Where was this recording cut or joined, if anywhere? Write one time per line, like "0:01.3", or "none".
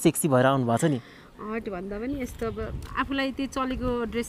none